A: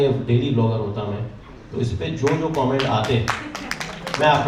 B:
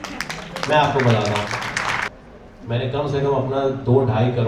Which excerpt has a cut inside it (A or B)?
B